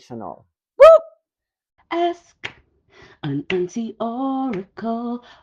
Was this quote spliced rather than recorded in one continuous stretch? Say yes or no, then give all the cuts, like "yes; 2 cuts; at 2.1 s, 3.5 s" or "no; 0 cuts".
yes; 1 cut; at 1.9 s